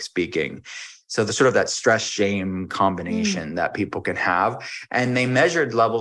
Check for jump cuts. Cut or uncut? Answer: uncut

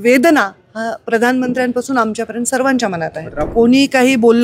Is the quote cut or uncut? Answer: cut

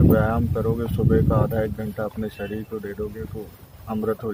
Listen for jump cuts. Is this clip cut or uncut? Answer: uncut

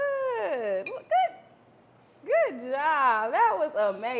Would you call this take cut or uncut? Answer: uncut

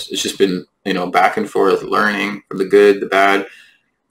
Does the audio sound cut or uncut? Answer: uncut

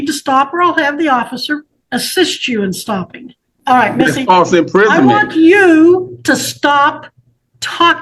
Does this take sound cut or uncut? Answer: cut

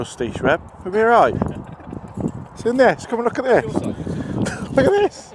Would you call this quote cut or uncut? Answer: uncut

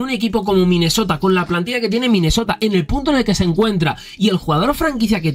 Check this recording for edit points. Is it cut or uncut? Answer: uncut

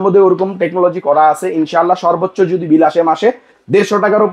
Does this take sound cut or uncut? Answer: uncut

